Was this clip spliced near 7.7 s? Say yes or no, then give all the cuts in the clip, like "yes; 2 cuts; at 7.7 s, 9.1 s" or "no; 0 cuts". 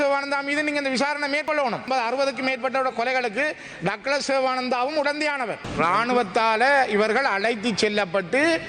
no; 2 cuts; at 1.6 s, 5.6 s